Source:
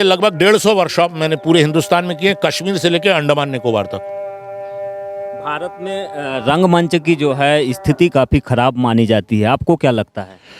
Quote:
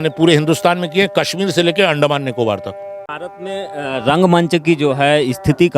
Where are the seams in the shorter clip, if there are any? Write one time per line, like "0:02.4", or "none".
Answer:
0:03.2